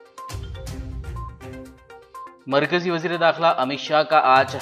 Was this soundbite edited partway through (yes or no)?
yes